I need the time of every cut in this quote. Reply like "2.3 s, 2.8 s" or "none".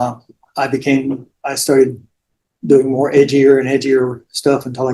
none